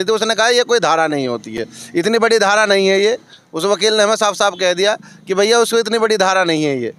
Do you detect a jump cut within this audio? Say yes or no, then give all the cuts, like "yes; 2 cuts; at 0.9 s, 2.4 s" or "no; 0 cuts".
no; 0 cuts